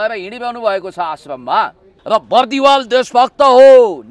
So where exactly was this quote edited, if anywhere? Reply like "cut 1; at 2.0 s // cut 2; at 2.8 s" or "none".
cut 1; at 1.9 s